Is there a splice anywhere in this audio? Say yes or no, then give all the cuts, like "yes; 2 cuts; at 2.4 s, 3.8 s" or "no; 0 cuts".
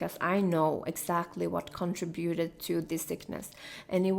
no; 0 cuts